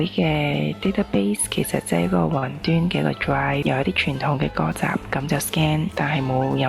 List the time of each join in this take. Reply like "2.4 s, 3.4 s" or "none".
3.6 s, 5.9 s